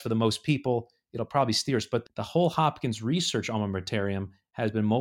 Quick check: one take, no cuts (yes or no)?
no